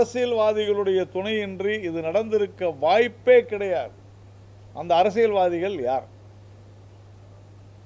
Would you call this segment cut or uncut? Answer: uncut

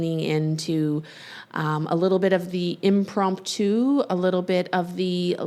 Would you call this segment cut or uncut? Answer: uncut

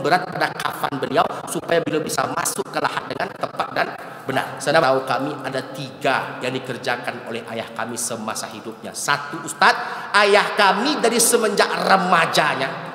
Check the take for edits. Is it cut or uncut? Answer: cut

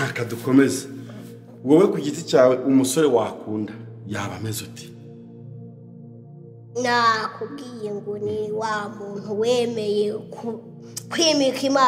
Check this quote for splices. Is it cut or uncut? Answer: uncut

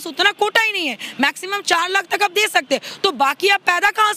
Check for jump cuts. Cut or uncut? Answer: uncut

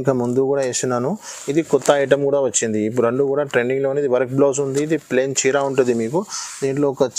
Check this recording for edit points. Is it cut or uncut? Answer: uncut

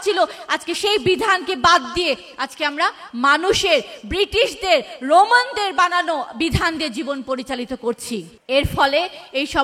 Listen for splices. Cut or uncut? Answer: cut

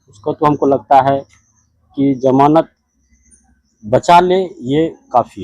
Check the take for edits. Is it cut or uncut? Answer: uncut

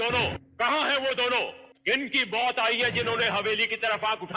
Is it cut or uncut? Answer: uncut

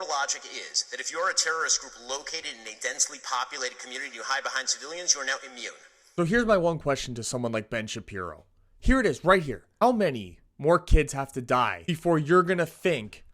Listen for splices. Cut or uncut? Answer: cut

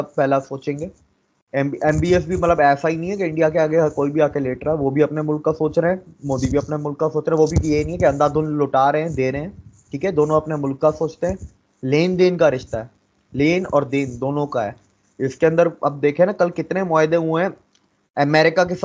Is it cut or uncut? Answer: cut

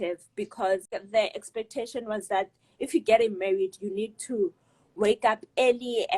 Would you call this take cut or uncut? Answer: cut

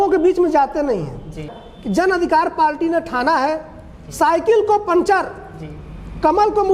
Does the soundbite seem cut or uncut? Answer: cut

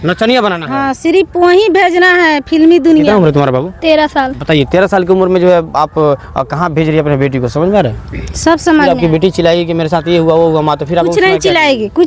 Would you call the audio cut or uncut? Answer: cut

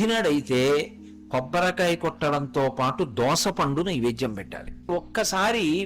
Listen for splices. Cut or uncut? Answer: cut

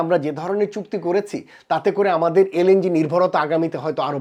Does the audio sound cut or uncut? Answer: uncut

